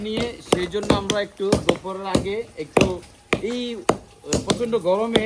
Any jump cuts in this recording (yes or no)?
no